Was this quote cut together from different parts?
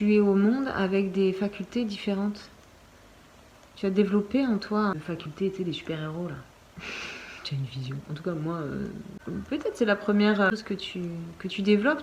yes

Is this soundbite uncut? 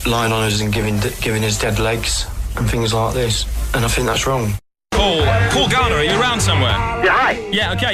yes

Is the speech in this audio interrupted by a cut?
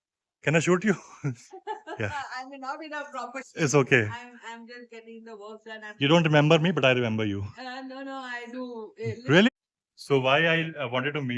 yes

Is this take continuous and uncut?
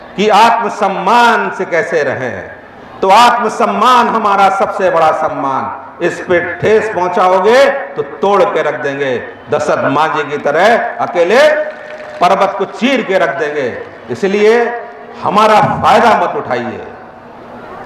yes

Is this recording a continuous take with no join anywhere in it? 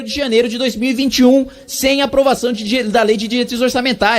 yes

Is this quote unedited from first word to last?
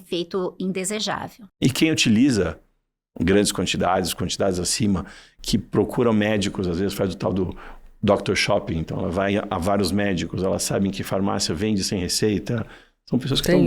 no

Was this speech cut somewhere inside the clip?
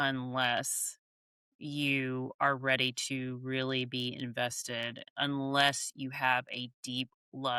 no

